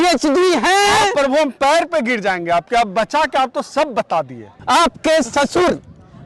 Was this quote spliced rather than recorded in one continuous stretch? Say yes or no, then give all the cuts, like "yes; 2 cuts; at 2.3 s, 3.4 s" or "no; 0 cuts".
yes; 1 cut; at 4.6 s